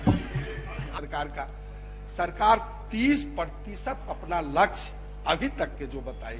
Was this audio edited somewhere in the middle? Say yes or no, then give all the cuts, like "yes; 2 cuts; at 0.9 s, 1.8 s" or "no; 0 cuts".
yes; 1 cut; at 0.9 s